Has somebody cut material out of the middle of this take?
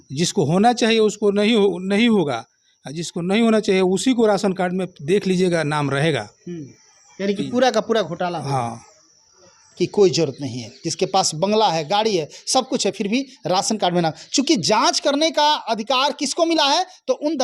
yes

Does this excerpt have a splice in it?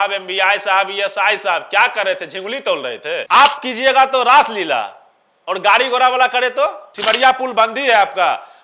yes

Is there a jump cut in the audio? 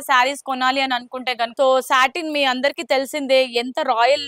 yes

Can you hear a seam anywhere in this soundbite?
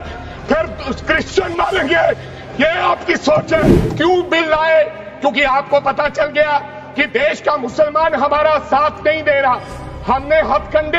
yes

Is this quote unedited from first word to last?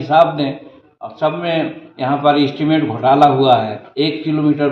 no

